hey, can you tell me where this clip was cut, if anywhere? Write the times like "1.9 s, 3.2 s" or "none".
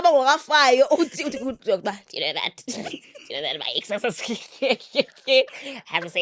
none